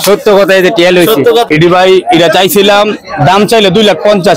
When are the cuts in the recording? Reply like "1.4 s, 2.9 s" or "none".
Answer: 1.5 s